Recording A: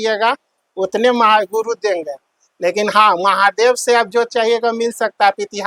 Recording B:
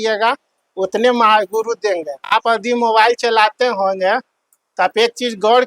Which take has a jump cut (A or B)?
B